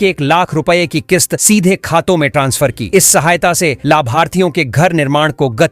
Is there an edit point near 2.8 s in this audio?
no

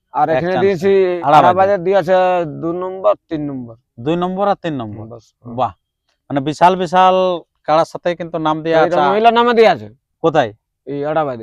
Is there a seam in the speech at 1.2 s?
yes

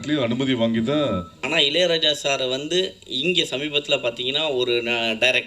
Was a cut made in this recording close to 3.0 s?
no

